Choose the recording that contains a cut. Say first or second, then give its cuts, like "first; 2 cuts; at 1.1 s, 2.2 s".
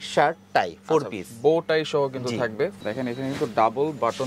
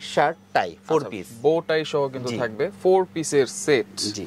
first; 1 cut; at 2.8 s